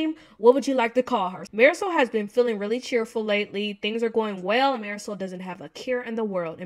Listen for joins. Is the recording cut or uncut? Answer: cut